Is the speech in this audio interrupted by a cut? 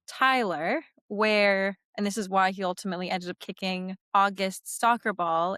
no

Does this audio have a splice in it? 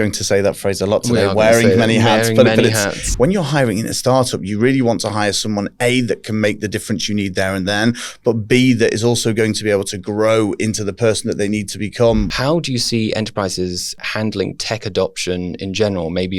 yes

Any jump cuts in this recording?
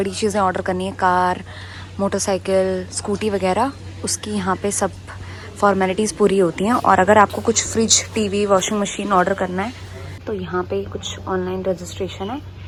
no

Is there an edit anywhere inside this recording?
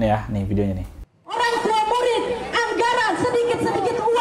no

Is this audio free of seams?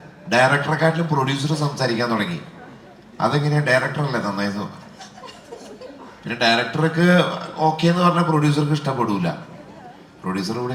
yes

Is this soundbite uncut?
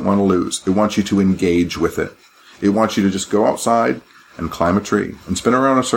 yes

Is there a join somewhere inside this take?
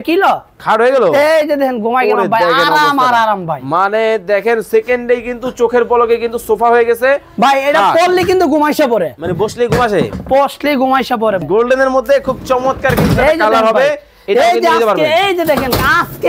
yes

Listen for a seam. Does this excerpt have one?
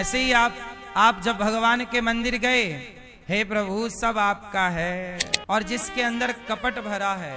yes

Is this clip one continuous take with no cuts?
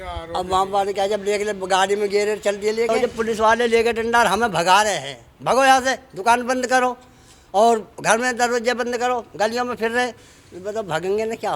no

